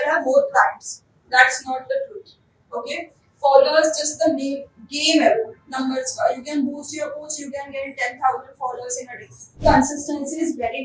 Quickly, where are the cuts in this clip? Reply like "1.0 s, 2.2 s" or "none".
9.6 s